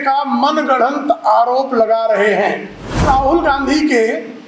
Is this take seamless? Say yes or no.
no